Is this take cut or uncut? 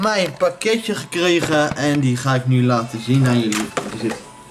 uncut